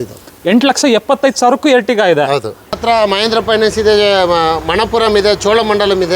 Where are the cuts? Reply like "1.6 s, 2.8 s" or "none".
2.7 s